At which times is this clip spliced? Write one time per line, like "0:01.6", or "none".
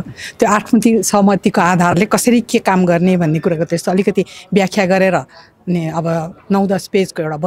none